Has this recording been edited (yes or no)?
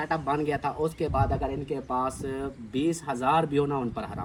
no